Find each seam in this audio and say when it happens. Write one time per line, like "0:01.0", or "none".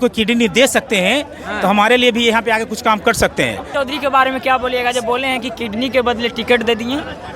0:03.7